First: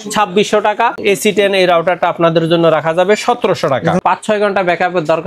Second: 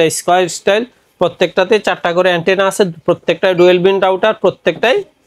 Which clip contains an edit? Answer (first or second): first